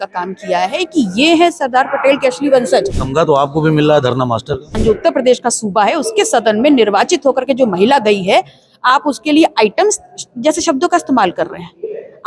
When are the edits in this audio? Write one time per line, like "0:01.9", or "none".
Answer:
0:03.0
0:04.7